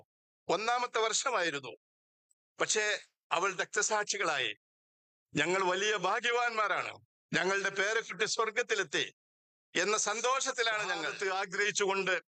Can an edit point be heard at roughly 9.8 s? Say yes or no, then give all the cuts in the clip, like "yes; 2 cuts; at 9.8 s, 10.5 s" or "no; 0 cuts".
no; 1 cut; at 11.1 s